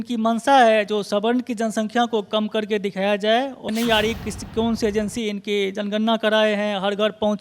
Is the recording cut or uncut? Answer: cut